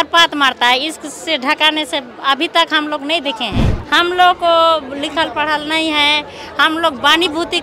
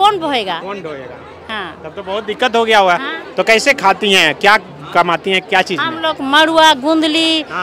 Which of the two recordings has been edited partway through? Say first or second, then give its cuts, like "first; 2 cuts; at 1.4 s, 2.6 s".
first; 1 cut; at 3.8 s